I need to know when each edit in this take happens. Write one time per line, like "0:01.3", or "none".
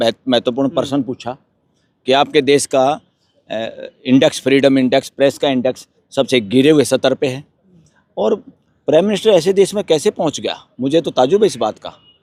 none